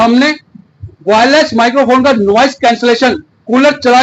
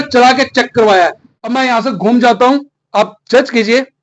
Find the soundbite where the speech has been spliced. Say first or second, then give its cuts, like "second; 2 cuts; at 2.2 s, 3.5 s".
second; 1 cut; at 1.3 s